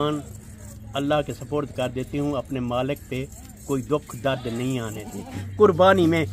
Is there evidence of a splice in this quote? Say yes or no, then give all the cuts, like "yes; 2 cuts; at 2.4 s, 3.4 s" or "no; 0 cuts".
yes; 1 cut; at 5.4 s